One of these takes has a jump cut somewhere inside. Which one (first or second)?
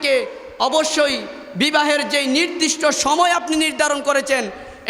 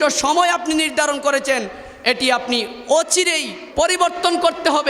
second